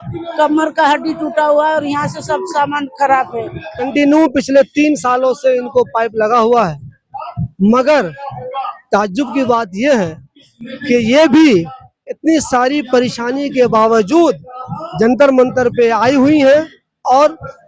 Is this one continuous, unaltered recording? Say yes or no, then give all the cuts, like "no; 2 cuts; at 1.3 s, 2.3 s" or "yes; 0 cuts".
no; 1 cut; at 3.9 s